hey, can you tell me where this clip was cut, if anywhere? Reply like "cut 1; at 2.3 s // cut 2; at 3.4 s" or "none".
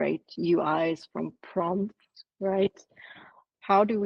none